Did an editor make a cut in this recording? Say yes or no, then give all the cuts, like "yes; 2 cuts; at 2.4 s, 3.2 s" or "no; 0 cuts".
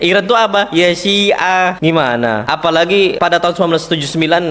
yes; 2 cuts; at 2.5 s, 3.2 s